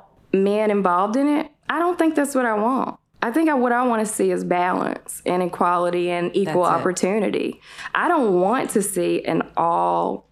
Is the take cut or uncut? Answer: uncut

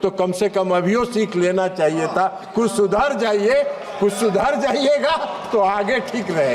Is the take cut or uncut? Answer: uncut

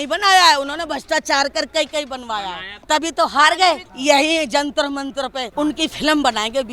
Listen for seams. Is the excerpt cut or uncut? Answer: cut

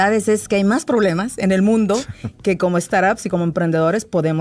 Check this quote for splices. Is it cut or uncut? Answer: uncut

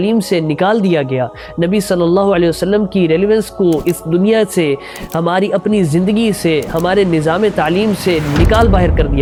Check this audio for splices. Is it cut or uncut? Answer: uncut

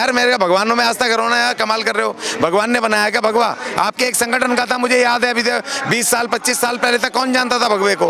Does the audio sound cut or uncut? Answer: uncut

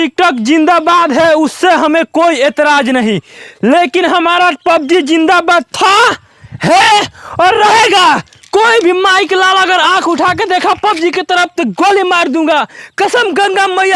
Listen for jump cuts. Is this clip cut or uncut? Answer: uncut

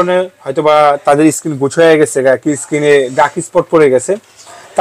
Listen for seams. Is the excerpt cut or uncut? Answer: uncut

